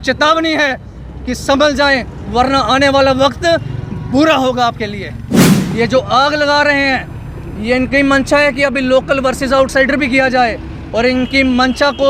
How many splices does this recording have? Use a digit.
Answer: 1